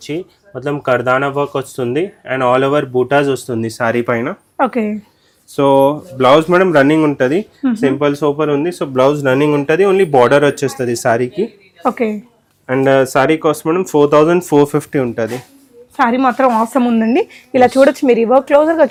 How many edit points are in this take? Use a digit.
0